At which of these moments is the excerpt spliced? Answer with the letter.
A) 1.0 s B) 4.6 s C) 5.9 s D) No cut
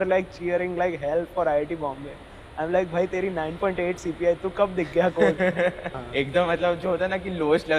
C